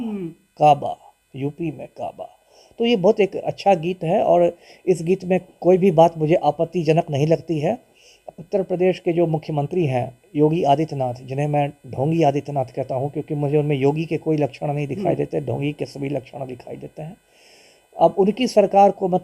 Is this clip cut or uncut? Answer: cut